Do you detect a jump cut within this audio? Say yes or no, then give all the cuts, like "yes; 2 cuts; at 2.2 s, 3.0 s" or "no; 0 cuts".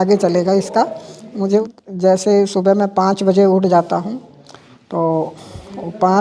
yes; 1 cut; at 1.6 s